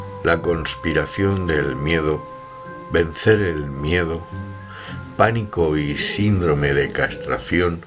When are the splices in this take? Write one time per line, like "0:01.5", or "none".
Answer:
0:03.8